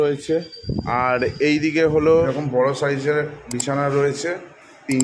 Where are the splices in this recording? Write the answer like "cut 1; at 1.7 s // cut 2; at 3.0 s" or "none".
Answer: cut 1; at 2.3 s